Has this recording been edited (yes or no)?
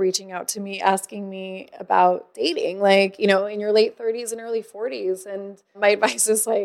yes